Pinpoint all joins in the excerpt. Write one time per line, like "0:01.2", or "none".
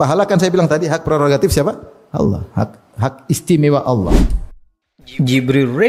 0:04.1